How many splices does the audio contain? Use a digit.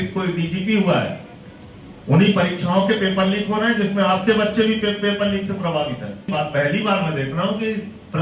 1